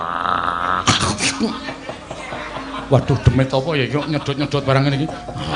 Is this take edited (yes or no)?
no